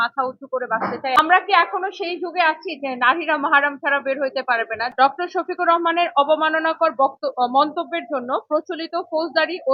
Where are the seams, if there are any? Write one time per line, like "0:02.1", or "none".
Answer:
0:01.2
0:04.9